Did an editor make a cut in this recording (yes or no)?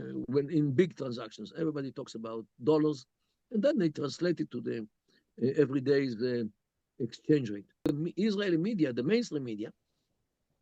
yes